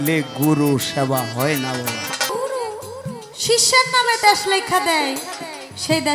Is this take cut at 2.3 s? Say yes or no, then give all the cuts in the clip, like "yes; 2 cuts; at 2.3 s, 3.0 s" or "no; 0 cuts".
yes; 1 cut; at 2.3 s